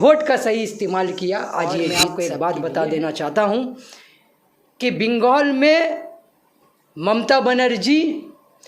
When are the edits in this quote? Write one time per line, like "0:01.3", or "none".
0:02.0